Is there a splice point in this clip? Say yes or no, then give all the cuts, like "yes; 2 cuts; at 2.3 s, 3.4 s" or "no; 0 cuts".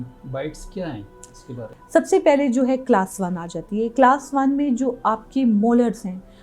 yes; 1 cut; at 1.7 s